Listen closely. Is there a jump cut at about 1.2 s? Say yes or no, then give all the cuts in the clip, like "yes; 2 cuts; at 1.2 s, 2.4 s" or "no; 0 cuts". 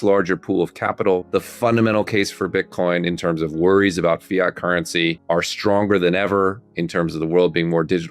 yes; 2 cuts; at 1.2 s, 5.2 s